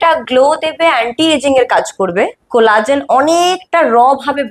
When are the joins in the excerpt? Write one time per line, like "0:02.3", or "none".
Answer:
0:02.4